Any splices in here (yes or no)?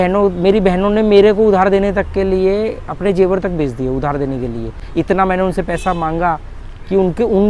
no